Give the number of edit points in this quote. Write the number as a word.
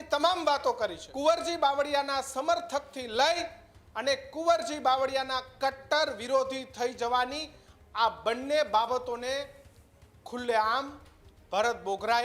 one